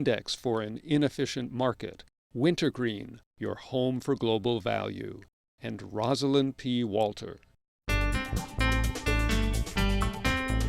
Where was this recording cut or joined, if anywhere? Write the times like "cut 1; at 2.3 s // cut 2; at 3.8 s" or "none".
cut 1; at 7.7 s